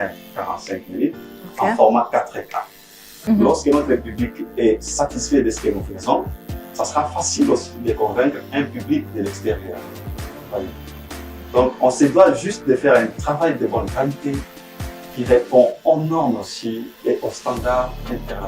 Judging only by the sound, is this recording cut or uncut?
cut